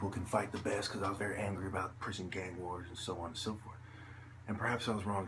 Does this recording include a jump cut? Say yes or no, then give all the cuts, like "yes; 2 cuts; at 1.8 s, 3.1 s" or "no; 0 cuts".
yes; 1 cut; at 1.7 s